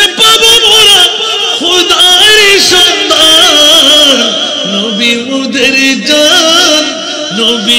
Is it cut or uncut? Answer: uncut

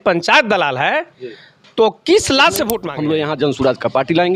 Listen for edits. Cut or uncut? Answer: cut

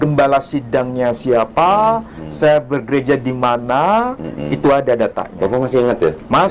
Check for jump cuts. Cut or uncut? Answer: uncut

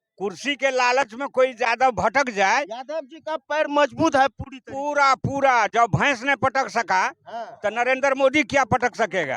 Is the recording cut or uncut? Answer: uncut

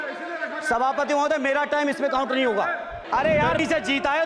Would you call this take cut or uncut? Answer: cut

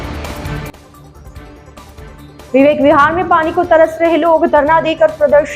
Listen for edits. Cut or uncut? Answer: uncut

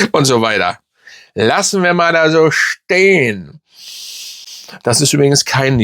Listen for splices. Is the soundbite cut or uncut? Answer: uncut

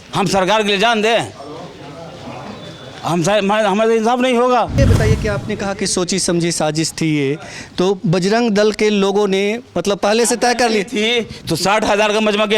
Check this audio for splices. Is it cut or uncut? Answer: cut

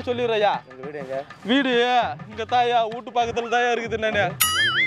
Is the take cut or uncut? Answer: uncut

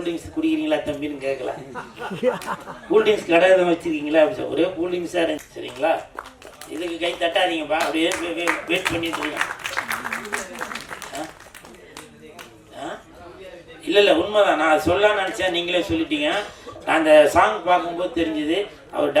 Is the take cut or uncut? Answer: cut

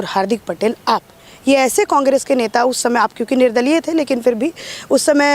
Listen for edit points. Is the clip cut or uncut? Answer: uncut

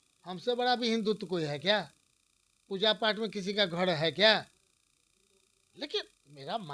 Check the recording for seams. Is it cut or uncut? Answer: uncut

